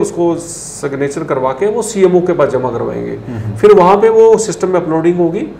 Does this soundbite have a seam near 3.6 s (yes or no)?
no